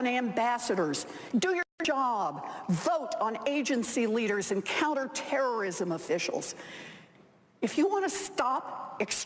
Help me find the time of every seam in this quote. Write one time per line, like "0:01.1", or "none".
none